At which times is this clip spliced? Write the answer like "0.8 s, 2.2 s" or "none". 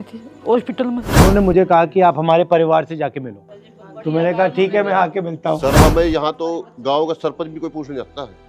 1.1 s, 5.8 s